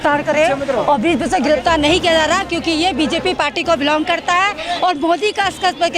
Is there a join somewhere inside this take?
no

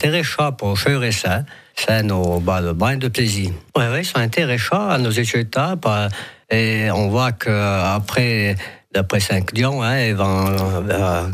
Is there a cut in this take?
yes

